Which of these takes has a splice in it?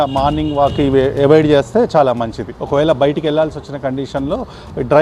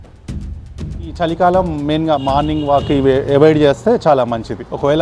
second; 1 cut; at 1.0 s

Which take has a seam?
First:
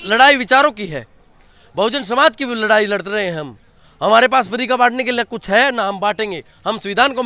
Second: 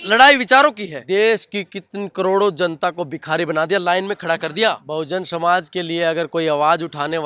second; 2 cuts; at 0.9 s, 4.8 s

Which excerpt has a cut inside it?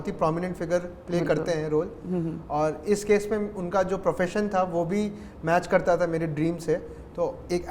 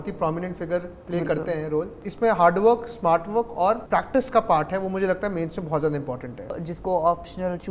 second; 3 cuts; at 2.0 s, 3.8 s, 6.5 s

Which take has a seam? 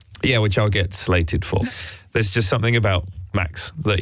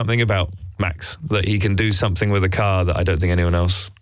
first; 1 cut; at 1.6 s

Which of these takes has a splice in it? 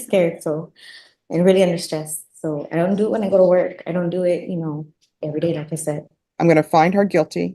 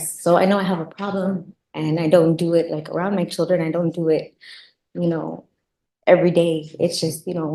first; 1 cut; at 6.0 s

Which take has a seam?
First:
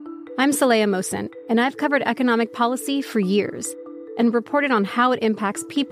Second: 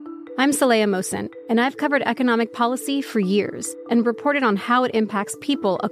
second; 1 cut; at 3.7 s

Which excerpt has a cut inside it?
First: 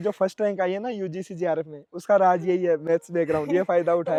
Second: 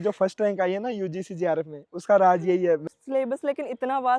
second; 1 cut; at 2.8 s

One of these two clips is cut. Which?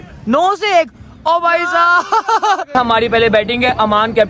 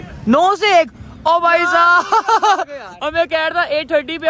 first; 1 cut; at 2.7 s

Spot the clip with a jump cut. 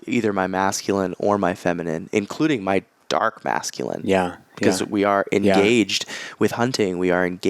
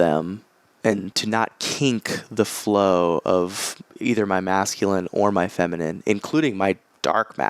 second; 1 cut; at 1.1 s

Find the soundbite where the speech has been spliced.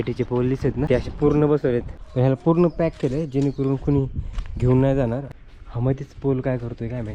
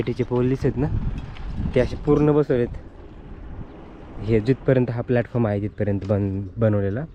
first; 3 cuts; at 0.9 s, 2.0 s, 5.4 s

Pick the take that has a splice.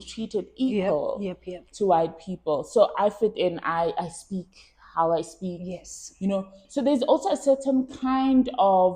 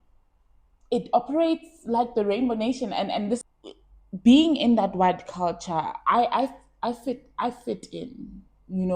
second; 1 cut; at 3.4 s

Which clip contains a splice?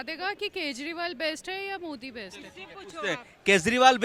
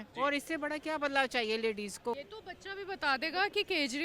second; 1 cut; at 2.2 s

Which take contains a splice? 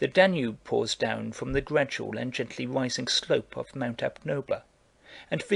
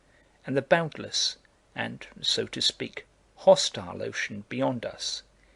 second; 1 cut; at 2.6 s

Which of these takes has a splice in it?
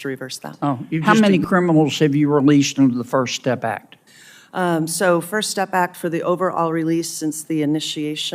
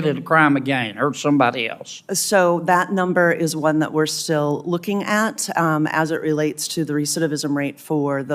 first; 1 cut; at 1.0 s

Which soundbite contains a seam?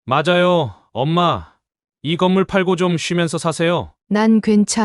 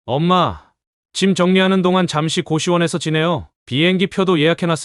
first; 1 cut; at 3.9 s

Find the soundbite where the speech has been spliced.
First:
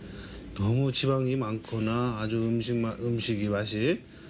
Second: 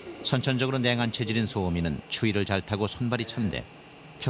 second; 1 cut; at 2.1 s

